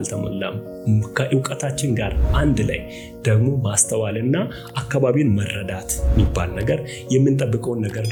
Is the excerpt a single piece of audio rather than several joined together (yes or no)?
yes